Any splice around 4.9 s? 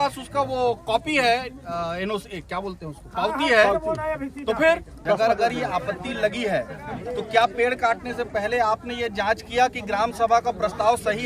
yes; 1 cut; at 4.9 s

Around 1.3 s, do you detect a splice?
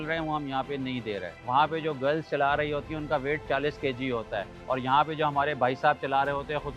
yes; 2 cuts; at 1.3 s, 4.5 s

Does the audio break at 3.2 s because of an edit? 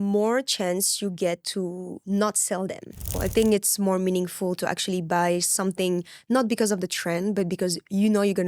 yes; 1 cut; at 3.2 s

